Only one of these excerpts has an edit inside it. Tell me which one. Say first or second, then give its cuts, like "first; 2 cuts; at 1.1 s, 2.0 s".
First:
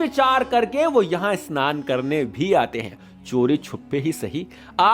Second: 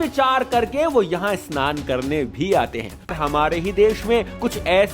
second; 1 cut; at 3.2 s